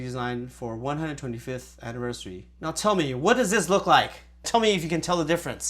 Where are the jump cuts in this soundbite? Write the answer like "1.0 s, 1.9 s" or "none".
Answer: 2.5 s, 4.5 s